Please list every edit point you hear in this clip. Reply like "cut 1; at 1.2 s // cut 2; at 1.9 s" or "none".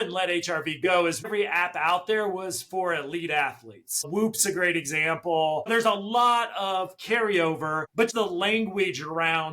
cut 1; at 1.3 s // cut 2; at 5.6 s // cut 3; at 8.1 s